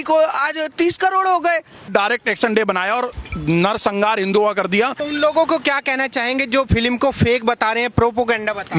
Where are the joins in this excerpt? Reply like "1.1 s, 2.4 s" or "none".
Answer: 1.9 s, 4.9 s